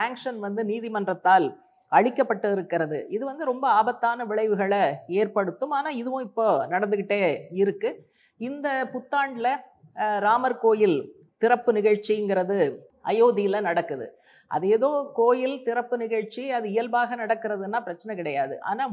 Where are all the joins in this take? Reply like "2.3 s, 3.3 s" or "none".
12.9 s